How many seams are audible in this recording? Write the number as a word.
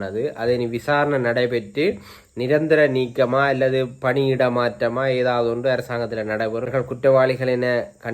one